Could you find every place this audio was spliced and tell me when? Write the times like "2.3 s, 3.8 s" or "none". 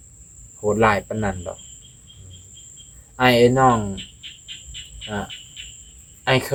none